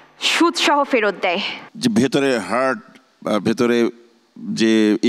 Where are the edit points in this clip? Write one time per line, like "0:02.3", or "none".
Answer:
0:01.6